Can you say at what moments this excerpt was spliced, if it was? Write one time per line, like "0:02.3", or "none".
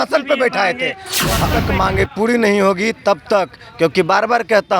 0:01.5